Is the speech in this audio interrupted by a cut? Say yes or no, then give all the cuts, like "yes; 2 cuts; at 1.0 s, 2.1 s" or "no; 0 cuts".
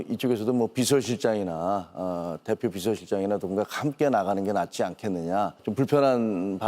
yes; 1 cut; at 5.6 s